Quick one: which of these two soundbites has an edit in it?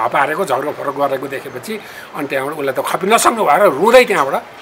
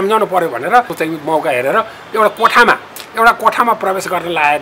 second; 1 cut; at 0.9 s

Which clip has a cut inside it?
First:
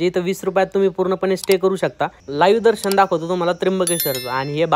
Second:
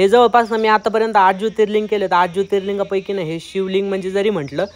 first; 1 cut; at 2.2 s

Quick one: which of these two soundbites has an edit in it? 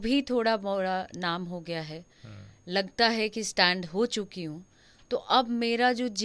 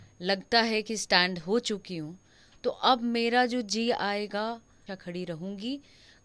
second; 1 cut; at 4.9 s

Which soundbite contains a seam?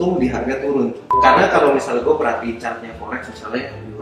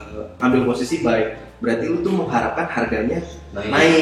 first; 1 cut; at 1.1 s

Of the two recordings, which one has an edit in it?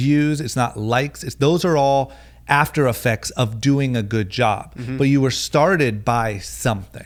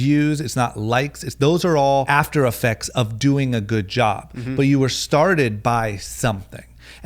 second; 1 cut; at 2.1 s

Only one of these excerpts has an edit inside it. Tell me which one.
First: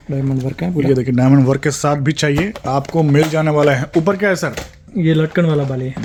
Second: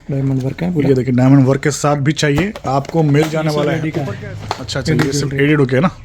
second; 1 cut; at 3.8 s

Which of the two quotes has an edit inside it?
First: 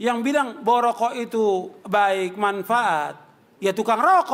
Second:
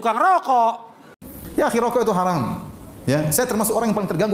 second; 1 cut; at 1.4 s

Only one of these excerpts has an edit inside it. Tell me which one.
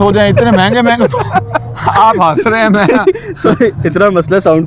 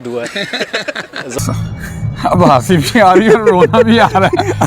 second; 1 cut; at 1.4 s

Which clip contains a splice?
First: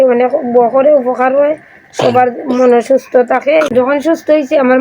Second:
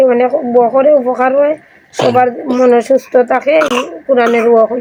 first; 1 cut; at 3.7 s

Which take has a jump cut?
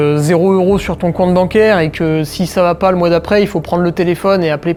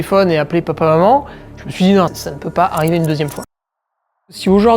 second; 2 cuts; at 2.2 s, 4.0 s

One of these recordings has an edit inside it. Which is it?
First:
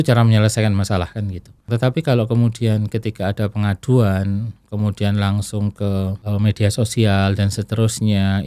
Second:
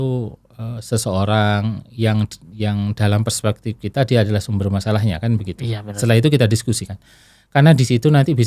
first; 2 cuts; at 1.6 s, 6.2 s

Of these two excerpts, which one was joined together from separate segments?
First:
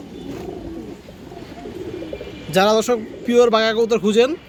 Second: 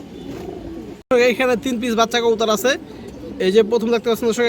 second; 1 cut; at 1.0 s

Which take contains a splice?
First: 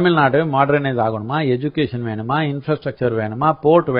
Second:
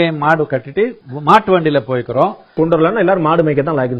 second; 2 cuts; at 1.1 s, 2.5 s

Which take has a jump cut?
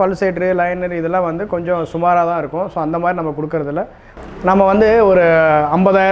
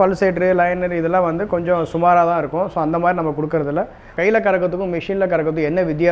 second; 1 cut; at 4.1 s

